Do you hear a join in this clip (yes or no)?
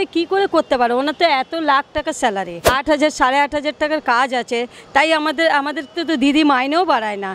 yes